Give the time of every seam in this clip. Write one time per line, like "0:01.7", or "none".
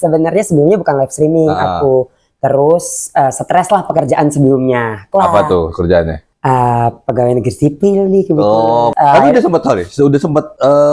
0:05.0
0:06.2
0:08.9